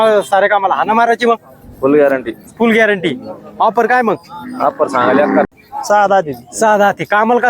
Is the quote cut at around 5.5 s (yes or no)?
yes